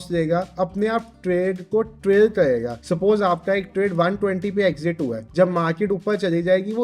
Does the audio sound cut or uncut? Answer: cut